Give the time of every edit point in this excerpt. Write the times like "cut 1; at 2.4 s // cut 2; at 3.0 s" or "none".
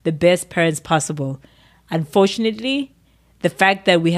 none